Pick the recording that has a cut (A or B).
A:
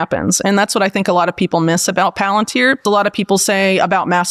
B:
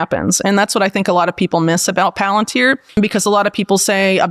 A